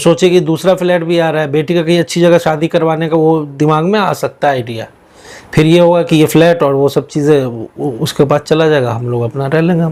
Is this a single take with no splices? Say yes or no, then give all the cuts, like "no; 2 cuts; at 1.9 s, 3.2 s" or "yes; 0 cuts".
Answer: yes; 0 cuts